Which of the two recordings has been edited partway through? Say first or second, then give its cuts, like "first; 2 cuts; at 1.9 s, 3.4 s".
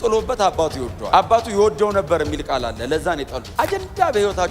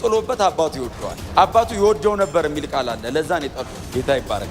first; 2 cuts; at 0.9 s, 3.4 s